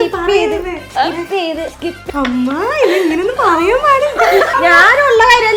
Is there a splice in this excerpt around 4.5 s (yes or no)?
yes